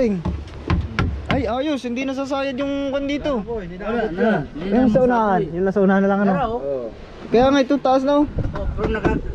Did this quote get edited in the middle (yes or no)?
no